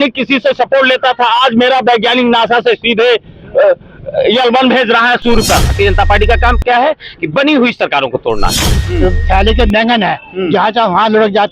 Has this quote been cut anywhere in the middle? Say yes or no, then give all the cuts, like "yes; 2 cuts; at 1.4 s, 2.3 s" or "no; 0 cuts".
yes; 2 cuts; at 5.7 s, 8.8 s